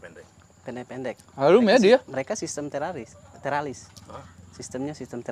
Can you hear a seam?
no; 0 cuts

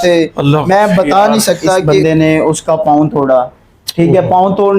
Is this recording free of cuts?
no; 1 cut; at 1.9 s

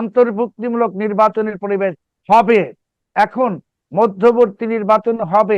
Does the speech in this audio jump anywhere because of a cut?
no; 0 cuts

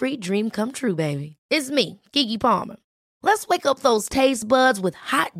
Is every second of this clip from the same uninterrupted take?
yes; 0 cuts

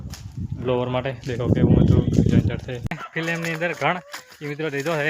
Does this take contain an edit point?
yes; 1 cut; at 2.9 s

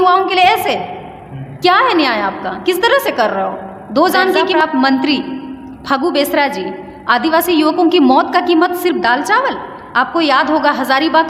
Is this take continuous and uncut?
no; 1 cut; at 4.6 s

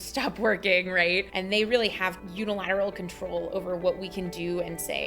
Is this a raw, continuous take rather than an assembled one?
no; 1 cut; at 1.3 s

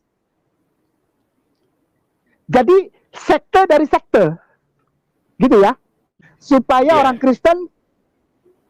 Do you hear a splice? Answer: yes; 1 cut; at 6.1 s

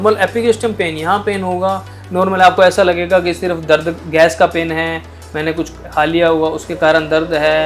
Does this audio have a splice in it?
no; 0 cuts

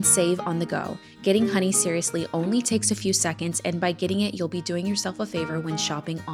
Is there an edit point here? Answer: no; 0 cuts

